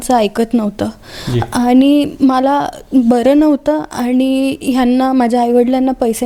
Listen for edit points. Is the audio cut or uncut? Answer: uncut